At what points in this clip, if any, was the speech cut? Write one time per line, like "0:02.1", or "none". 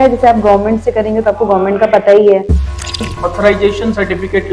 0:02.9